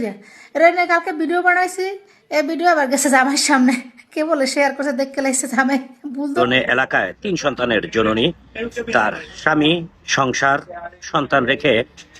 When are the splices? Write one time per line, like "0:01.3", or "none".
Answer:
0:06.4